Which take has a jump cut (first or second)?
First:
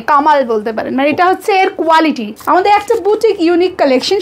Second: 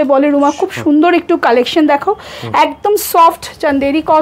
first